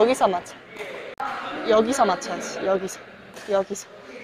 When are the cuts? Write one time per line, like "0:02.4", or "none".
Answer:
0:01.2